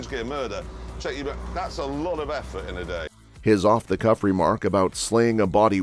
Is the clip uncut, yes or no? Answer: yes